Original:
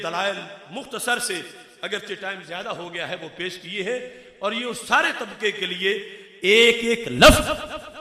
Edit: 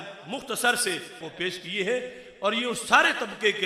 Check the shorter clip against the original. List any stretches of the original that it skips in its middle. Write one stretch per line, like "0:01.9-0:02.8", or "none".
0:01.7-0:03.3

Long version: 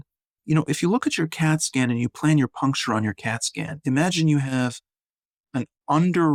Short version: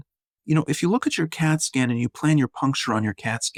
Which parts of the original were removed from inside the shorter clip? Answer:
none

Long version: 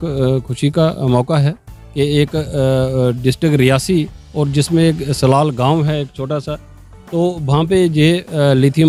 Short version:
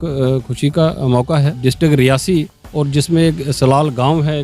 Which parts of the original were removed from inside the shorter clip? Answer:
0:01.6-0:03.2

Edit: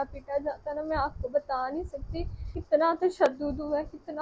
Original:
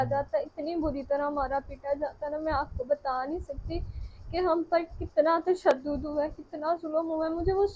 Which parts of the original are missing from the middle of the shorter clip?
0:04.1-0:05.0

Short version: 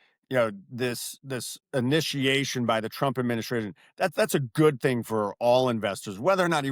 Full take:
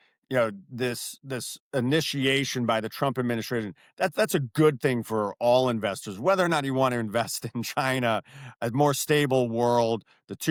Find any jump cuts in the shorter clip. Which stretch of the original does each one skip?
none

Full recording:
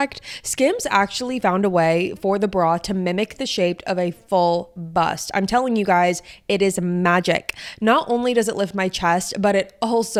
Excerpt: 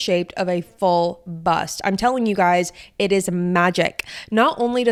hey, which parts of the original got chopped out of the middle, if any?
none

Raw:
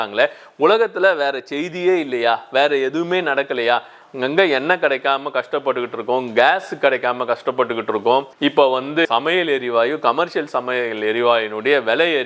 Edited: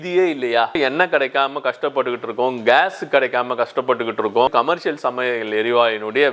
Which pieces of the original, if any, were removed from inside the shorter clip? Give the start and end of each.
0:02.5-0:04.5
0:08.2-0:10.0

